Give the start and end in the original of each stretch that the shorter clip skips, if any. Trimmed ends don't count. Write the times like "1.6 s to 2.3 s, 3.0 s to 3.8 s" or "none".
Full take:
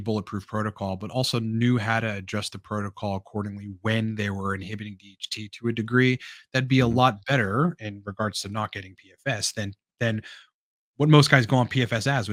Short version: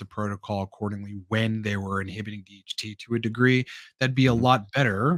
none